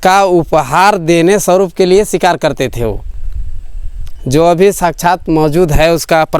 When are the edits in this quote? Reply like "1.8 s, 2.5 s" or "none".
none